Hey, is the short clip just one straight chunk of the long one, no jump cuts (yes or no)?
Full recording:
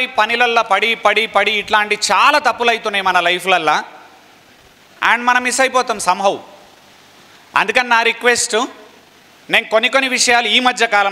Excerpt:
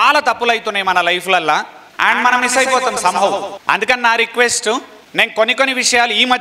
no